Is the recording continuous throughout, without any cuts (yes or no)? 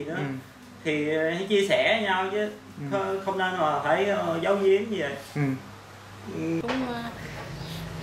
no